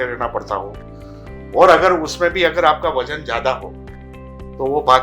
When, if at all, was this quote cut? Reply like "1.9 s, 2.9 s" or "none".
none